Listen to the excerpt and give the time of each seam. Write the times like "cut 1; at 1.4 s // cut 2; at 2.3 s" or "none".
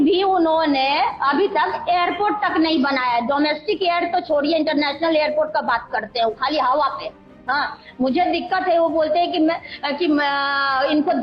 none